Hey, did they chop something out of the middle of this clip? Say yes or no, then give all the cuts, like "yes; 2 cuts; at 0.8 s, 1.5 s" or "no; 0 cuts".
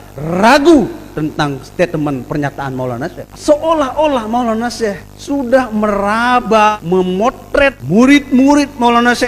yes; 4 cuts; at 3.3 s, 5.1 s, 6.7 s, 7.8 s